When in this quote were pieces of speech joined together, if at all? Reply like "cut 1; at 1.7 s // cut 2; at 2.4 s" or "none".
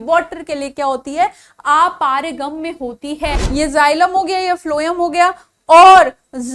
cut 1; at 3.4 s